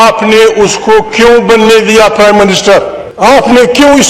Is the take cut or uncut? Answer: cut